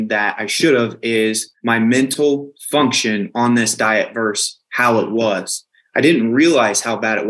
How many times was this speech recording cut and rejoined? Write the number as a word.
one